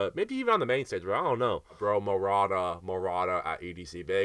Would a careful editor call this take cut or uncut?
cut